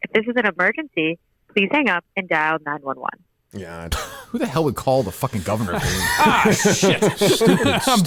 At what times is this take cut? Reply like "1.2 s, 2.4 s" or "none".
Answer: none